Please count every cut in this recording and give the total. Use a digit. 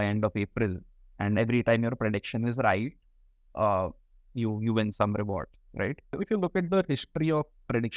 1